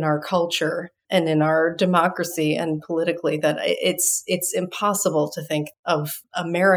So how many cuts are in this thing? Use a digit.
2